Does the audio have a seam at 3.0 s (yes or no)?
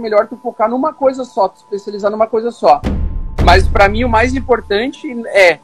yes